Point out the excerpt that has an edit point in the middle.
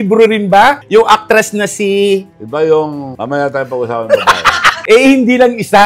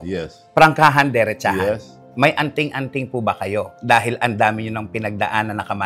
first; 1 cut; at 4.7 s

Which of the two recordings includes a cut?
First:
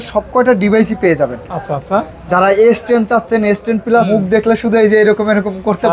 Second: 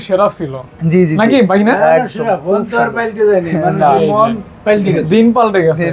first; 1 cut; at 4.1 s

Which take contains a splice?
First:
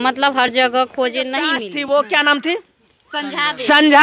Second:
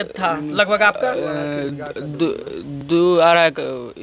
first; 1 cut; at 1.6 s

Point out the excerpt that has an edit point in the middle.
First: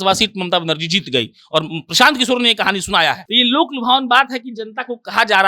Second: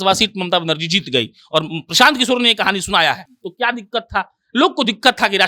first; 1 cut; at 3.2 s

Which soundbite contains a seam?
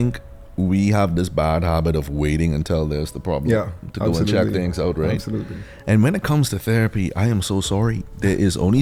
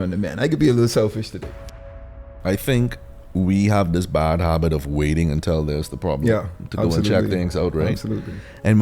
second; 1 cut; at 1.7 s

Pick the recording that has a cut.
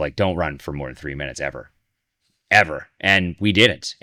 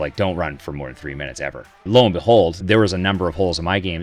second; 2 cuts; at 1.8 s, 2.6 s

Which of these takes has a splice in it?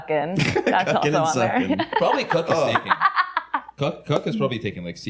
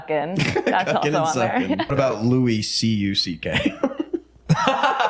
second; 1 cut; at 2.0 s

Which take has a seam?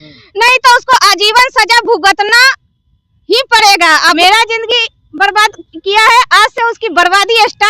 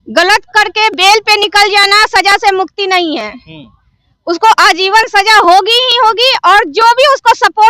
first; 1 cut; at 4.2 s

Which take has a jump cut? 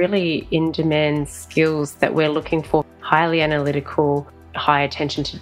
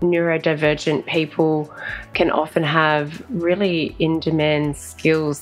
first; 2 cuts; at 2.9 s, 4.5 s

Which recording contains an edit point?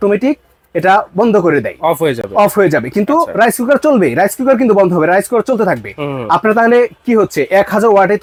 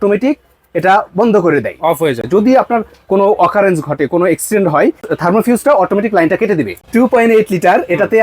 second; 3 cuts; at 2.2 s, 5.0 s, 6.8 s

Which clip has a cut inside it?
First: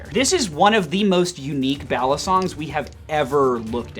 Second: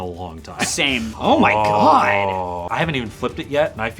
second; 2 cuts; at 1.1 s, 2.6 s

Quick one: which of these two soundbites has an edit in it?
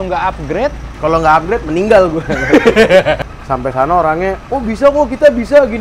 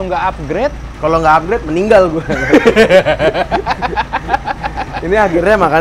first; 1 cut; at 3.2 s

